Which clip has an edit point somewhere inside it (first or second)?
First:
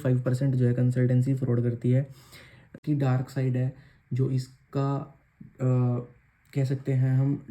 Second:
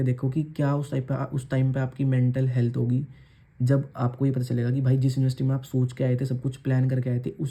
first